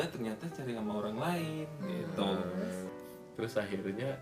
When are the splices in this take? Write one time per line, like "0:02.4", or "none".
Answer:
0:02.8

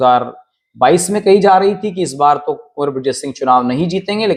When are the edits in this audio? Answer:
none

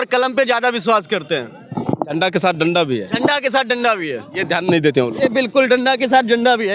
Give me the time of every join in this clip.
none

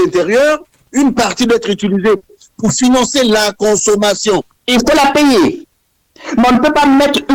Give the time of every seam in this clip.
0:04.5

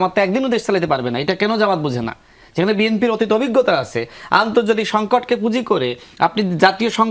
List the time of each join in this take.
none

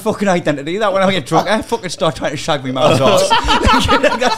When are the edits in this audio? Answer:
none

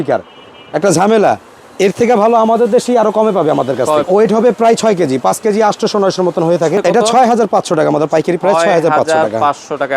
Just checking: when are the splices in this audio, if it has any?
0:04.1
0:06.7

